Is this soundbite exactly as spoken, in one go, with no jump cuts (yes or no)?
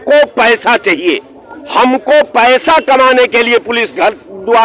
yes